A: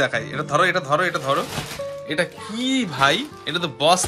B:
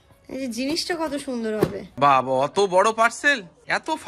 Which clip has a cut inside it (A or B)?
B